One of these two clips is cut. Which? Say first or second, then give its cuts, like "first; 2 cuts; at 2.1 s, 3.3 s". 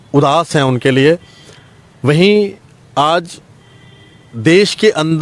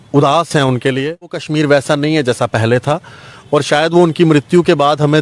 second; 1 cut; at 1.4 s